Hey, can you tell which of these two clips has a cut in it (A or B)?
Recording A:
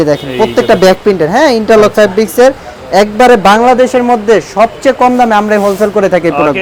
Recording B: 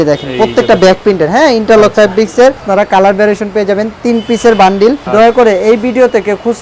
B